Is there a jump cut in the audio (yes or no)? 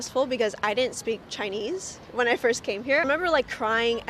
yes